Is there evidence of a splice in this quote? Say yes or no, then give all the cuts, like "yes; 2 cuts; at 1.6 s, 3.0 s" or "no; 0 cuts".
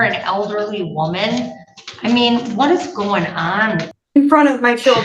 yes; 1 cut; at 4.0 s